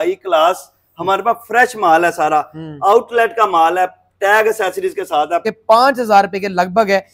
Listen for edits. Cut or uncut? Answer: cut